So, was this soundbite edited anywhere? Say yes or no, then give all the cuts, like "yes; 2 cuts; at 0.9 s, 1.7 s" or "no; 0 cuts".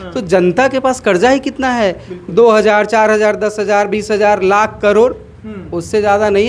no; 0 cuts